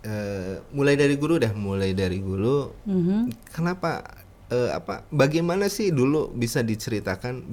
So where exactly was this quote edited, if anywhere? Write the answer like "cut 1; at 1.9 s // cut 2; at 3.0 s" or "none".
none